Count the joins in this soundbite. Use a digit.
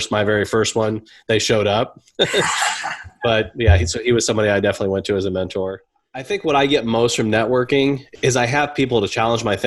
1